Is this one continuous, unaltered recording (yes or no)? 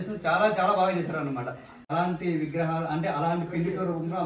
no